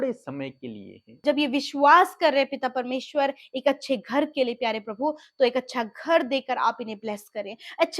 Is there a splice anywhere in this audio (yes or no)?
yes